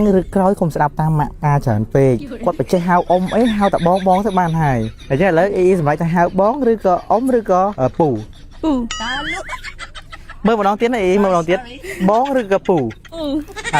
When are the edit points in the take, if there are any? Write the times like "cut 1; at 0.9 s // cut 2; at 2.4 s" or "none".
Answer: cut 1; at 2.3 s // cut 2; at 5.0 s // cut 3; at 7.9 s